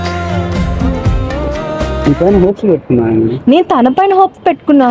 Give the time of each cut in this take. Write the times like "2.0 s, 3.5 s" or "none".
none